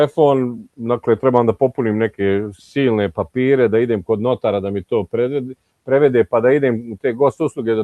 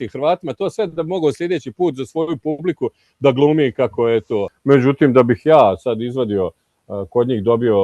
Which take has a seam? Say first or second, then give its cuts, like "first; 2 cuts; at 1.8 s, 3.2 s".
second; 1 cut; at 4.5 s